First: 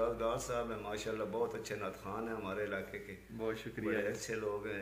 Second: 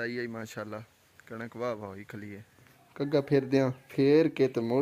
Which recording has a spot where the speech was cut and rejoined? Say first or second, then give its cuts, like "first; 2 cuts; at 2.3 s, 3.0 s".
second; 2 cuts; at 2.8 s, 3.8 s